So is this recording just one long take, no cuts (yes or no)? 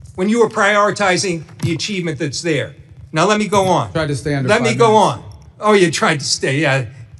yes